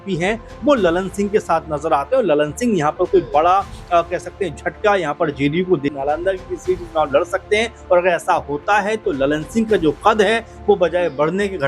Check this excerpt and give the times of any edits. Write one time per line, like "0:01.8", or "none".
0:05.9